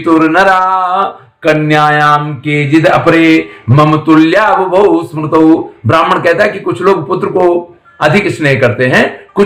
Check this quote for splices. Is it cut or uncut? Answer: uncut